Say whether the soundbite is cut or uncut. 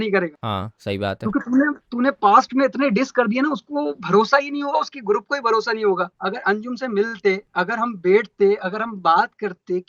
cut